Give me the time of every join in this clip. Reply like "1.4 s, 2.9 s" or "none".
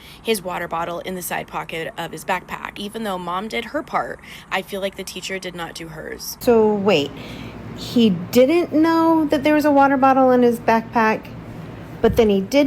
2.8 s, 6.4 s